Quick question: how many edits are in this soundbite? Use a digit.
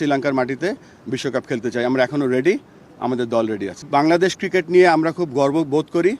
1